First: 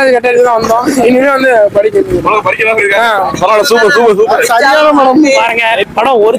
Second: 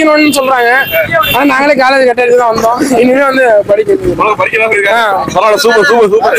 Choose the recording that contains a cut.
first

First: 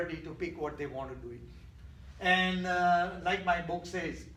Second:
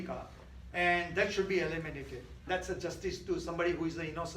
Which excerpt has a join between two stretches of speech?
second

